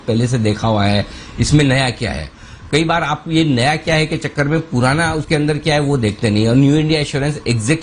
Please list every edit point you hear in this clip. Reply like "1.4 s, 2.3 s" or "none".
none